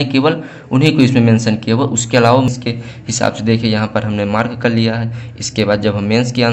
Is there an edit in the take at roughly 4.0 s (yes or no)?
no